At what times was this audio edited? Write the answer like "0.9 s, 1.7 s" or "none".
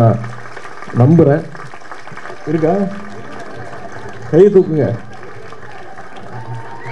none